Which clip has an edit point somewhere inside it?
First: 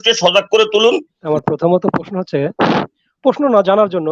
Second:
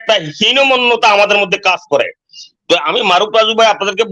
first; 1 cut; at 1.1 s

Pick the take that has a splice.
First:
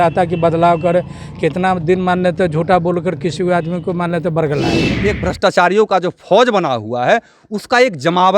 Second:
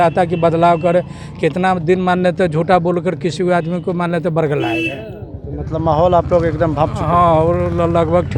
first; 1 cut; at 4.9 s

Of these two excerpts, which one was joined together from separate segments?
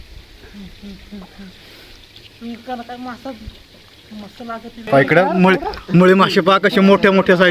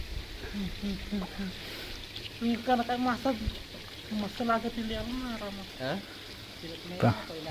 first; 1 cut; at 4.9 s

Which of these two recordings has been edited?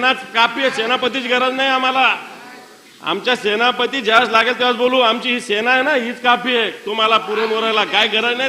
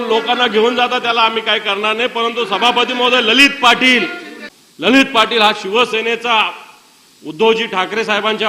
second; 1 cut; at 4.9 s

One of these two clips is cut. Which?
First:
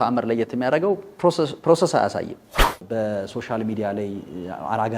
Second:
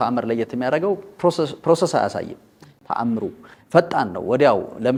first; 1 cut; at 2.8 s

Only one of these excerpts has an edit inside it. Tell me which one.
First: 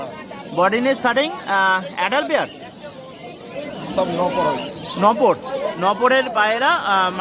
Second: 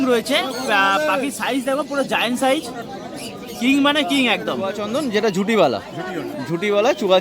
second; 1 cut; at 4.8 s

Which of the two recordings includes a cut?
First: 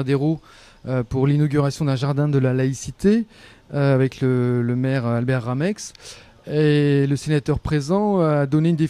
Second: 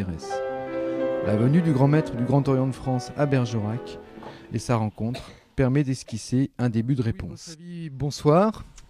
second; 1 cut; at 3.0 s

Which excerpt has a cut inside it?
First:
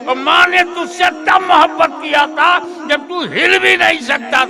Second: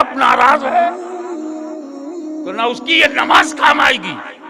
second; 2 cuts; at 1.0 s, 2.5 s

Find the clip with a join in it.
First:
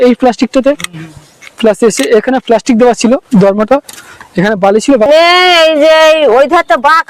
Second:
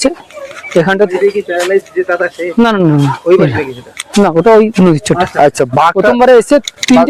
first; 1 cut; at 5.1 s

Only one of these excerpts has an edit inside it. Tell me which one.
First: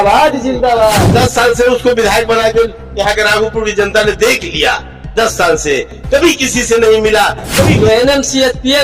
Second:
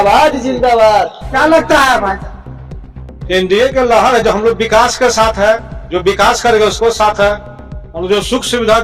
first; 2 cuts; at 1.0 s, 7.7 s

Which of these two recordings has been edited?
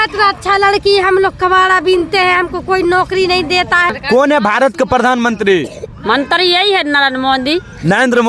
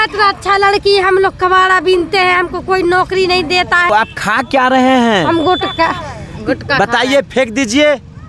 first; 1 cut; at 3.9 s

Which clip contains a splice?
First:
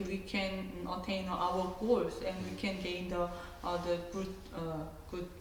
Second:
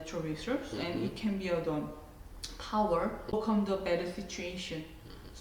second; 1 cut; at 3.3 s

